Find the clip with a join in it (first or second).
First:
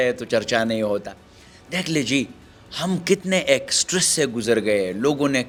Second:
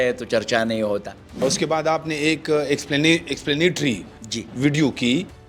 second